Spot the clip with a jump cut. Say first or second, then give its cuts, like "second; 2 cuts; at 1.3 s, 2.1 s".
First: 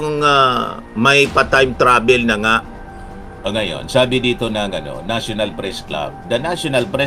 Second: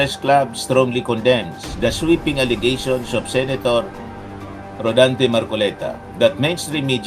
first; 1 cut; at 3.2 s